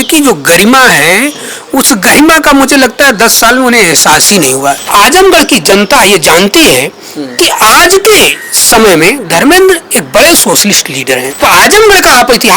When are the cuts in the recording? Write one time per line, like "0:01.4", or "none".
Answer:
0:04.9
0:11.4